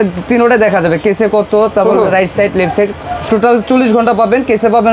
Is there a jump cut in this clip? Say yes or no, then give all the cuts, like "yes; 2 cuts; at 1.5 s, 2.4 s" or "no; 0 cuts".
no; 0 cuts